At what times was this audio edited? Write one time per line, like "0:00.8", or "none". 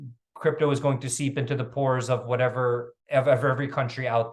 none